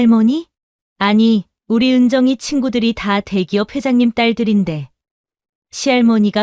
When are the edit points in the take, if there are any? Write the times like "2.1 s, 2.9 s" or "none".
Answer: none